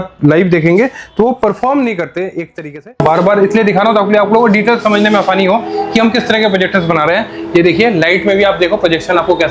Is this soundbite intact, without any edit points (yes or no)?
no